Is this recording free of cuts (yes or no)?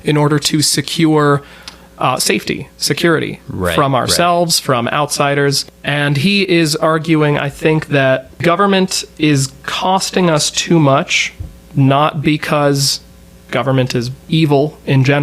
no